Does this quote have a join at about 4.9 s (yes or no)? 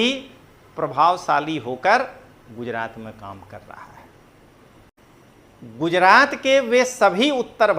yes